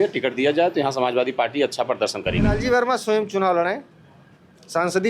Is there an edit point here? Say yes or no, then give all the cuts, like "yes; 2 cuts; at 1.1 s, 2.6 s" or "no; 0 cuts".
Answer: yes; 1 cut; at 2.6 s